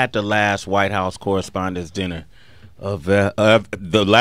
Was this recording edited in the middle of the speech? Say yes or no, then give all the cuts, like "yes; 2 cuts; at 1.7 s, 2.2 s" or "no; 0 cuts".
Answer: yes; 1 cut; at 1.9 s